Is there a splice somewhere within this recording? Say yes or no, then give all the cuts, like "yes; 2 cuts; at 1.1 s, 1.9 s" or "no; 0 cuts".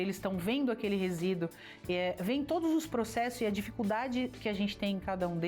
no; 0 cuts